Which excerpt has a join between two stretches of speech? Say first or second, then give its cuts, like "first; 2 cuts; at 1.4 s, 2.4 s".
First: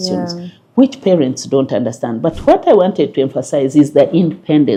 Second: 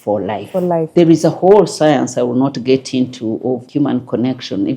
second; 2 cuts; at 0.9 s, 3.6 s